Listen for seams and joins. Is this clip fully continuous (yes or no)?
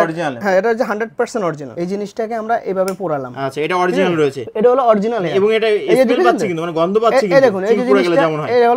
yes